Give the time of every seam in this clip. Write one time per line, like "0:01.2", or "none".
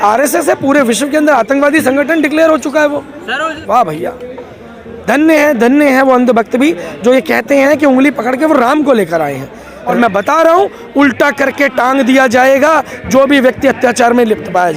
0:03.6
0:09.7